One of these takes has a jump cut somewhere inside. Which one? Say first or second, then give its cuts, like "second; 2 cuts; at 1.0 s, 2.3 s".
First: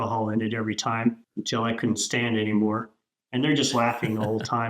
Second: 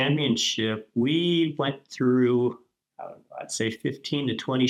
first; 1 cut; at 1.2 s